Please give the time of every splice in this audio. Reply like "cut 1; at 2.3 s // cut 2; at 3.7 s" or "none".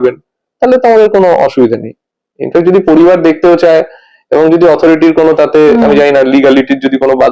none